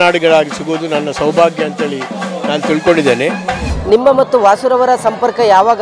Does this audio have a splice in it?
yes; 1 cut; at 3.7 s

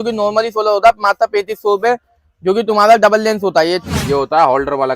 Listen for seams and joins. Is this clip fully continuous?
no; 1 cut; at 3.9 s

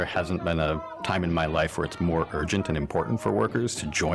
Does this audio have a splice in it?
yes; 1 cut; at 0.9 s

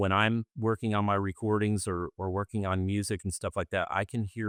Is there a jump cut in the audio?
no; 0 cuts

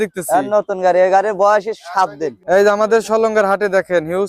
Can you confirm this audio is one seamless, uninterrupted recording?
no; 1 cut; at 2.4 s

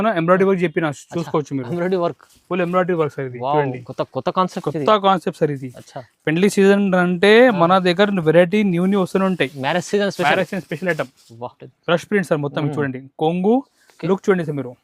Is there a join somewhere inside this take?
yes; 1 cut; at 11.7 s

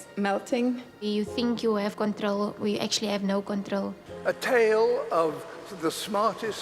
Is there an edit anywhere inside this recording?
yes; 1 cut; at 4.0 s

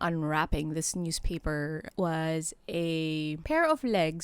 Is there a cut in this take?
yes; 2 cuts; at 1.9 s, 3.4 s

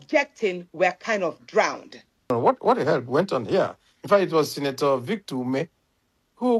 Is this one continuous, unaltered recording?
no; 1 cut; at 2.3 s

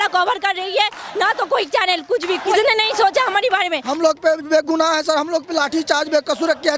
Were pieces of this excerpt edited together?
yes; 2 cuts; at 2.6 s, 3.8 s

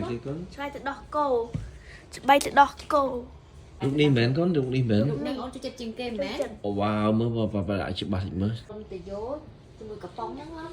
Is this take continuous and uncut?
no; 1 cut; at 8.6 s

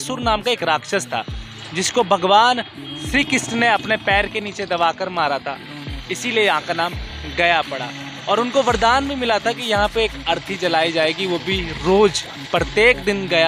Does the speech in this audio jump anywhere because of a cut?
no; 0 cuts

